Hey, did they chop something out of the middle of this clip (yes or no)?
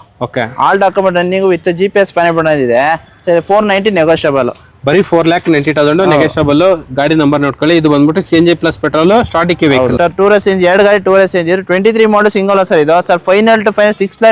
yes